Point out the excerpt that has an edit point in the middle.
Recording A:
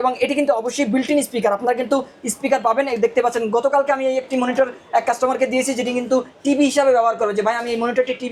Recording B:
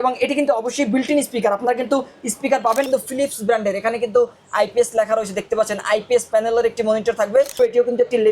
B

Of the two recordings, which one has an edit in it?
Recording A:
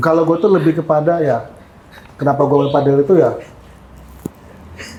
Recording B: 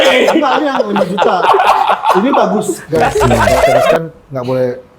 B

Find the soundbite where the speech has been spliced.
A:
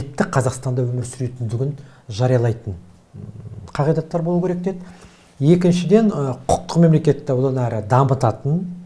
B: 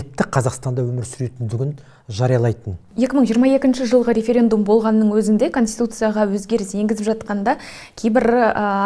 B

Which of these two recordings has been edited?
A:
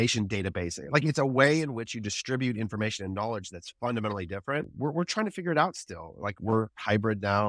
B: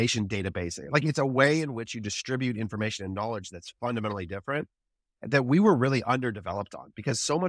A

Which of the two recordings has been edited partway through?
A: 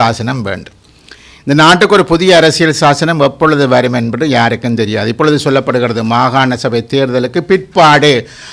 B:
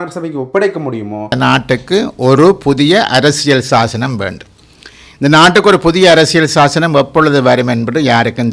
B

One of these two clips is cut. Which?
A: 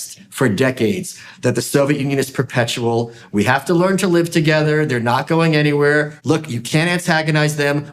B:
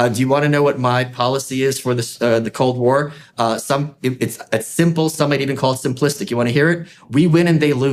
A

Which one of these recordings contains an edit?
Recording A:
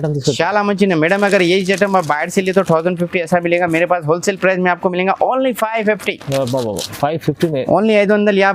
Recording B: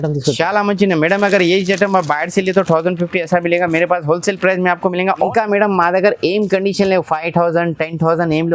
B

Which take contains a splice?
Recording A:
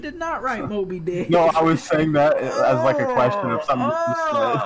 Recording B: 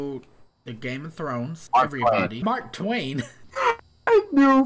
B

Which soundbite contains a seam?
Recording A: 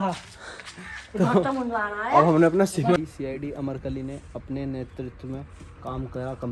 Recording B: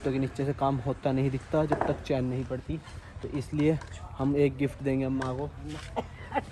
A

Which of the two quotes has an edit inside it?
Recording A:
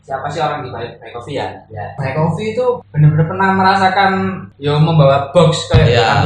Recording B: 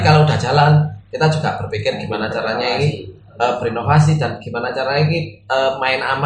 A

